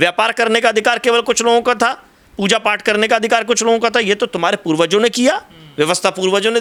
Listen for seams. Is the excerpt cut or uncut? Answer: uncut